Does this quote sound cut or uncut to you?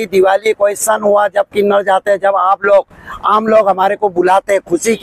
uncut